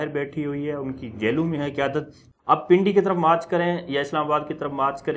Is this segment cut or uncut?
cut